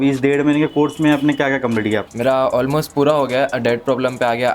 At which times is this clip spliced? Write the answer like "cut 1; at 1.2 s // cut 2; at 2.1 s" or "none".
cut 1; at 2.1 s